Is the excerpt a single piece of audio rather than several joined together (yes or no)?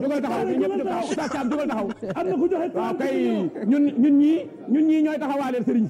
yes